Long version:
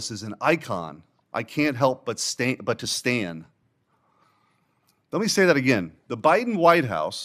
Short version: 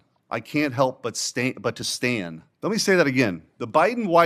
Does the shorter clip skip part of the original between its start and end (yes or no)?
yes